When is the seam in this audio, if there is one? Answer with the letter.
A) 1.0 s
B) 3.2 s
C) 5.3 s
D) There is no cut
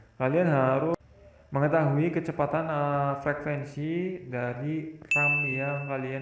A